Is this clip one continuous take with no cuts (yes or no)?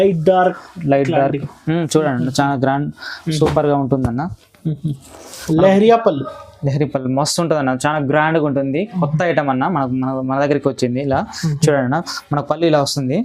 no